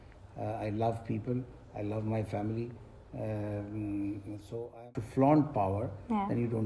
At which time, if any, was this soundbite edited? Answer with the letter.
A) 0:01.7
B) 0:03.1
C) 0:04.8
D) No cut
C